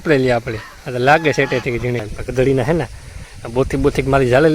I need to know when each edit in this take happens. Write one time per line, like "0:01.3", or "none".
0:02.2